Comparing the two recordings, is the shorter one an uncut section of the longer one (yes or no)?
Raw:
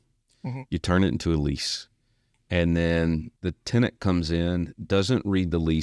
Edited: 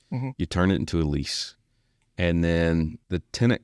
yes